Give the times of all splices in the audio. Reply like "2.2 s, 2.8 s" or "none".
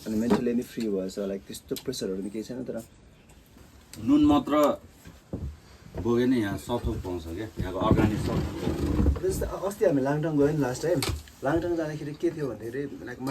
3.5 s